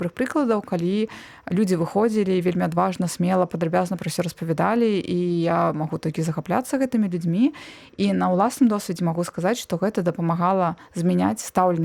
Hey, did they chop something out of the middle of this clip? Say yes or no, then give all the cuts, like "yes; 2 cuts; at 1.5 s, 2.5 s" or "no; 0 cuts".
no; 0 cuts